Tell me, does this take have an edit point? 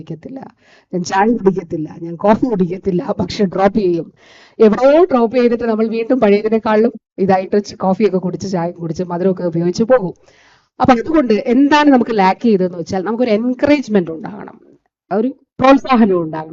no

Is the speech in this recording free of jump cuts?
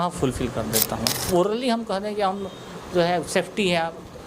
no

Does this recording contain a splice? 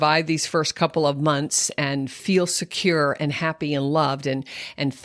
no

